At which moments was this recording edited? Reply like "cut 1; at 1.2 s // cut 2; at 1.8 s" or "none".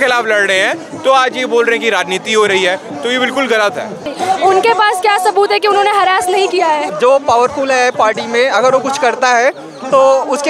cut 1; at 4.1 s // cut 2; at 6.9 s